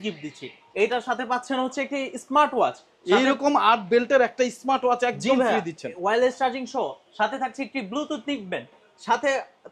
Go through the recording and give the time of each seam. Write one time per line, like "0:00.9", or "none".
none